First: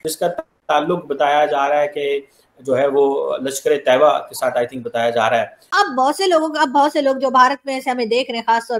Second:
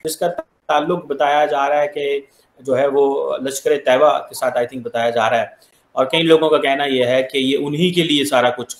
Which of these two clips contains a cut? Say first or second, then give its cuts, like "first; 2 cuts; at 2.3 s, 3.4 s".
first; 1 cut; at 5.6 s